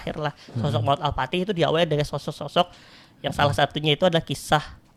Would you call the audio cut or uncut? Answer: uncut